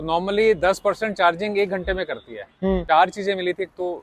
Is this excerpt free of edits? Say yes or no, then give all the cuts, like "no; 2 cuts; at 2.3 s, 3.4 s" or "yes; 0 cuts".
no; 1 cut; at 2.8 s